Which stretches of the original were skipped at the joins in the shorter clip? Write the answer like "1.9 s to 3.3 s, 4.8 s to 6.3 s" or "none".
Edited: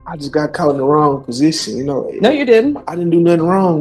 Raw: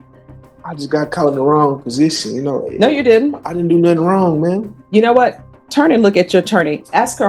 none